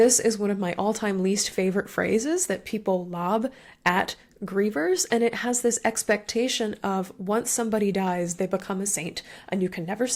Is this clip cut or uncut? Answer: uncut